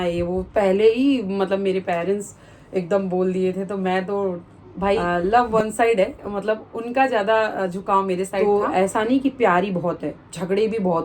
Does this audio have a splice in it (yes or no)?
yes